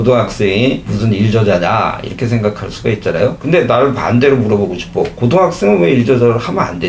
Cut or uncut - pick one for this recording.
uncut